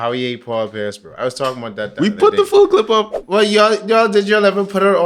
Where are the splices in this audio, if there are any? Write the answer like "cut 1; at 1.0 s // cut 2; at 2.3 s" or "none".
cut 1; at 3.2 s

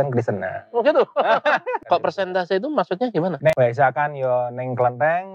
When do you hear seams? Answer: cut 1; at 1.8 s // cut 2; at 3.4 s

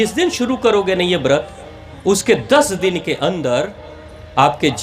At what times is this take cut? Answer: none

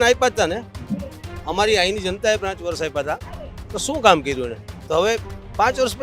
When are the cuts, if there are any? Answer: none

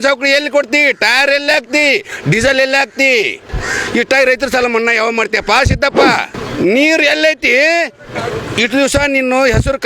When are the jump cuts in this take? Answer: cut 1; at 6.3 s

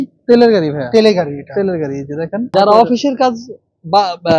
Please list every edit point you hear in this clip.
cut 1; at 2.5 s

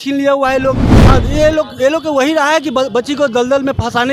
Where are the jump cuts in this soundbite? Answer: cut 1; at 0.9 s

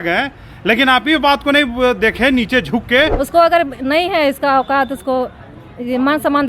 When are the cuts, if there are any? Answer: cut 1; at 3.2 s

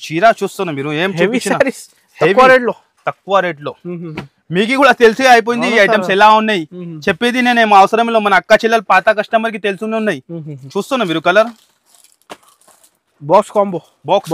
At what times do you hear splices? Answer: none

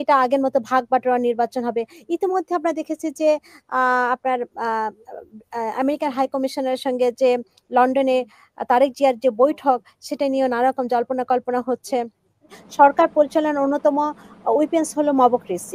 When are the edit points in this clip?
cut 1; at 12.6 s

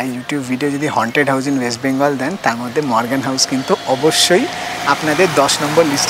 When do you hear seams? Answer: none

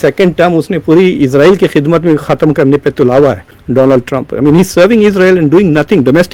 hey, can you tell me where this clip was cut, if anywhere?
none

